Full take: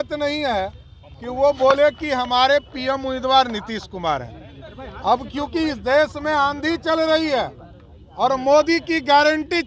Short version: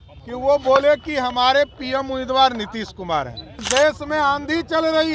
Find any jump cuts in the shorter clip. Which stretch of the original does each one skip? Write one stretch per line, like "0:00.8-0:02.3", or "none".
0:04.6-0:05.8